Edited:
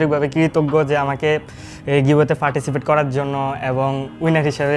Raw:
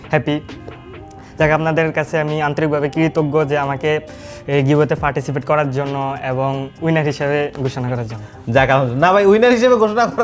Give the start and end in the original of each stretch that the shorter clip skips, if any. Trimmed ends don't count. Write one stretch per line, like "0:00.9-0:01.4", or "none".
none